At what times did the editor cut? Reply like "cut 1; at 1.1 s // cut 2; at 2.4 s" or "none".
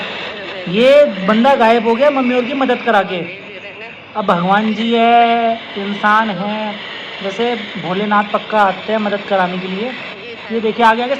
none